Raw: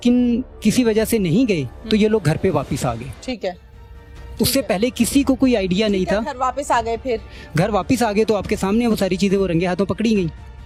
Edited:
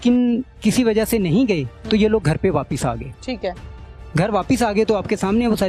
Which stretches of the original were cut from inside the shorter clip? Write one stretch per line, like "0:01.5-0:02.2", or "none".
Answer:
0:04.0-0:07.4